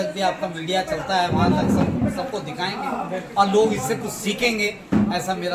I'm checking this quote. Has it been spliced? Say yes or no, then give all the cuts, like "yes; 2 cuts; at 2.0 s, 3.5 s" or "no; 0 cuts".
no; 0 cuts